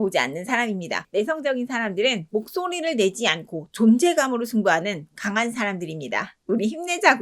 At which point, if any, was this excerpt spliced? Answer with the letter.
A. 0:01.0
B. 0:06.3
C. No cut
A